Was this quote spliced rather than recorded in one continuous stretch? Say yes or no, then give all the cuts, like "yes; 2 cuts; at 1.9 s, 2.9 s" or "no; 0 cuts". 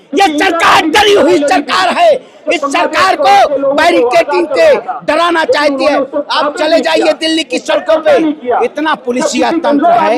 no; 0 cuts